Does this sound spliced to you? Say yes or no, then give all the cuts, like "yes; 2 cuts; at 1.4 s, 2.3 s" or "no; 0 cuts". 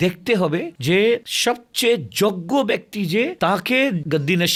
no; 0 cuts